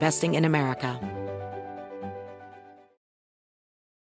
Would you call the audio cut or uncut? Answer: cut